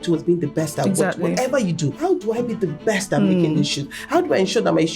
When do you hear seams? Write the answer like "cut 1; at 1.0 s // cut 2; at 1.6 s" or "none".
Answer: cut 1; at 1.9 s